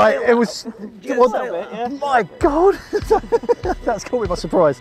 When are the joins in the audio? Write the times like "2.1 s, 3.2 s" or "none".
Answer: none